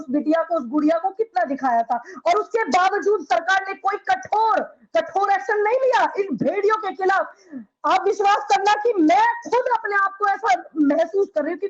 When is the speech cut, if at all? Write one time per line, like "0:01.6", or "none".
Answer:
none